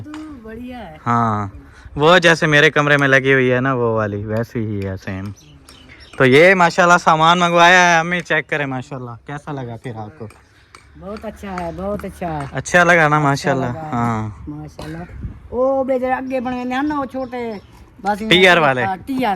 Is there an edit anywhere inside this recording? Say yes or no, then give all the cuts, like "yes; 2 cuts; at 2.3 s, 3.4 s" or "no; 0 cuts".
no; 0 cuts